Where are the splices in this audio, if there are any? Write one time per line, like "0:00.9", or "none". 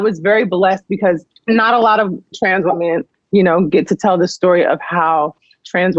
0:01.3
0:03.1